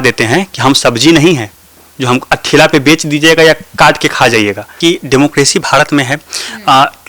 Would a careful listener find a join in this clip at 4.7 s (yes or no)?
yes